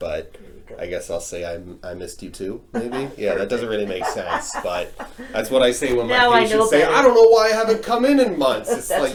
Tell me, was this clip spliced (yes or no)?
no